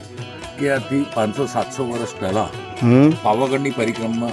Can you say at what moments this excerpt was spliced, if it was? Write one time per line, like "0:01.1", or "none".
0:03.2